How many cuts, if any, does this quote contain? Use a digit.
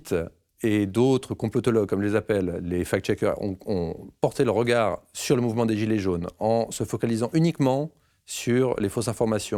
0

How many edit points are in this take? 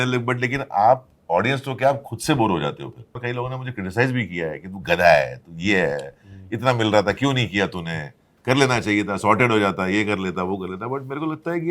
1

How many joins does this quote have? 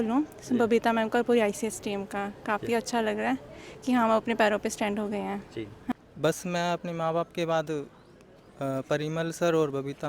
1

